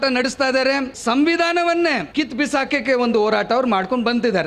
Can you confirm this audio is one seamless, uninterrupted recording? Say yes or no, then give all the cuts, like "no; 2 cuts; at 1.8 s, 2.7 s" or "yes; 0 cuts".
no; 2 cuts; at 0.9 s, 2.0 s